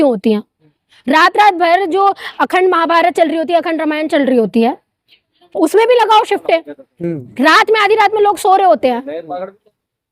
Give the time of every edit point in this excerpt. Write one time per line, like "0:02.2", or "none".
none